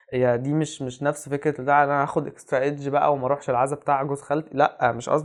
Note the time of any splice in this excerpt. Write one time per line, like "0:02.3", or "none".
none